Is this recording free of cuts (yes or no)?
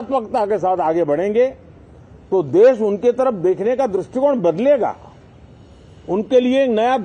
yes